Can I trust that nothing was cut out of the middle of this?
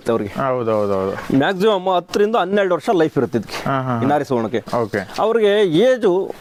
yes; 0 cuts

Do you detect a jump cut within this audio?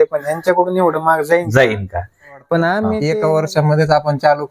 yes; 1 cut; at 3.0 s

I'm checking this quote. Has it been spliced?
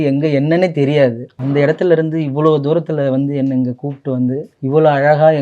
yes; 2 cuts; at 1.3 s, 4.5 s

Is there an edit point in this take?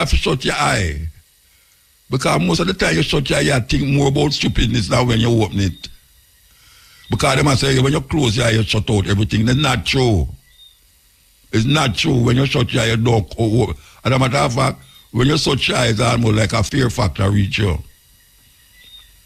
no; 0 cuts

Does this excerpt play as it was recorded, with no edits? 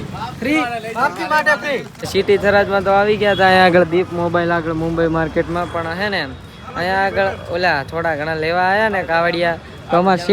no; 1 cut; at 2.0 s

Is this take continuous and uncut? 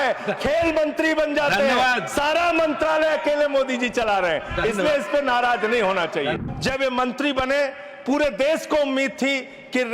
no; 1 cut; at 6.4 s

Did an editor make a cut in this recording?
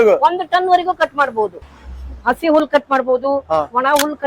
yes; 1 cut; at 1.6 s

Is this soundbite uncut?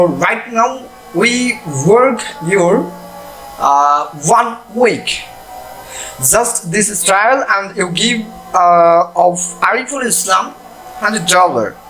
yes; 0 cuts

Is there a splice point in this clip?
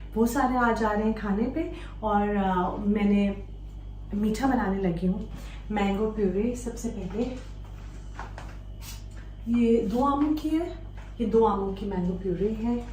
no; 0 cuts

